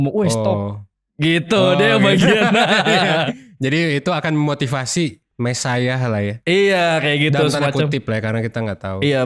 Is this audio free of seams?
yes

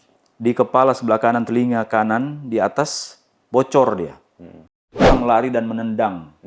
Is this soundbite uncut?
no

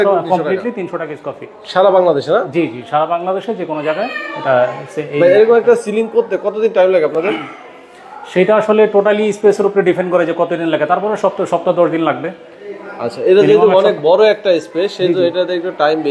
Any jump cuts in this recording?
no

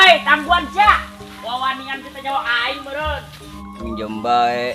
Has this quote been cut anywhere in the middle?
yes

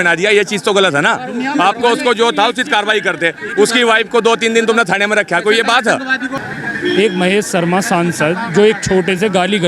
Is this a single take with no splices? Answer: no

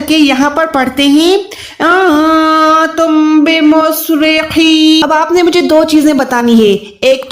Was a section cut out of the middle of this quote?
yes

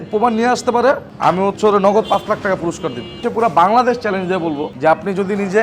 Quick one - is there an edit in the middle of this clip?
yes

